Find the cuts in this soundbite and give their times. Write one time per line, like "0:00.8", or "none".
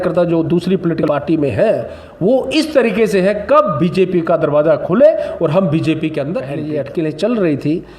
0:01.0
0:06.6